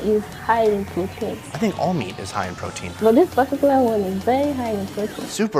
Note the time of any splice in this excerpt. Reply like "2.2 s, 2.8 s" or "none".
1.4 s, 2.9 s